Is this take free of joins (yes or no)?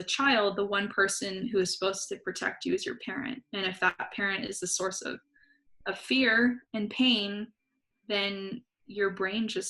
yes